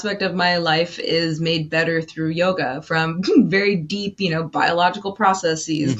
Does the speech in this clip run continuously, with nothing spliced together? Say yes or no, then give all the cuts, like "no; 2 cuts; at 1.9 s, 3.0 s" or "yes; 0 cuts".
yes; 0 cuts